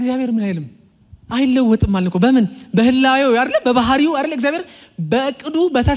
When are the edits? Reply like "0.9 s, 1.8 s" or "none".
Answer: none

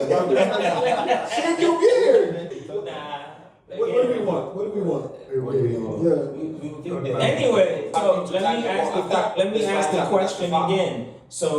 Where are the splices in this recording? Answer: 2.5 s, 7.9 s

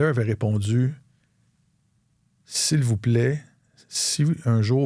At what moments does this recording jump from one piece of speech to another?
none

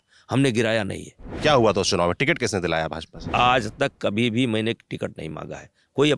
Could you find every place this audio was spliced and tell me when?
1.2 s, 3.2 s

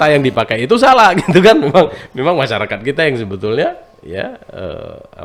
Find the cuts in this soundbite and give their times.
none

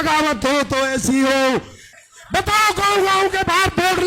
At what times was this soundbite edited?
1.9 s

